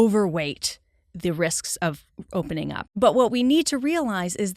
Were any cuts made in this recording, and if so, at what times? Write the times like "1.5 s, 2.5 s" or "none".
2.8 s